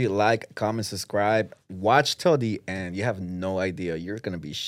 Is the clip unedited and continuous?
yes; 0 cuts

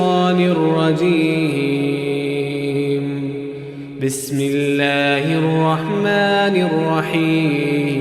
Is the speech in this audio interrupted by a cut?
no; 0 cuts

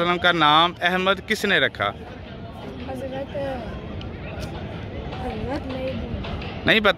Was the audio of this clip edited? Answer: no; 0 cuts

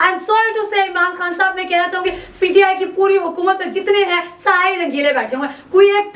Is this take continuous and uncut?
yes; 0 cuts

